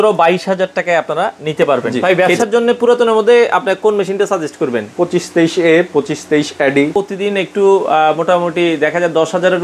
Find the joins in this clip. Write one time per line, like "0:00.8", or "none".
0:01.9
0:06.9